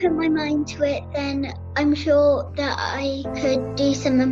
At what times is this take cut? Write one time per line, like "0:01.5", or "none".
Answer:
0:01.6
0:03.3